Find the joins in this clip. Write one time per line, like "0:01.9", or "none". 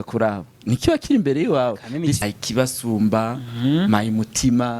0:02.2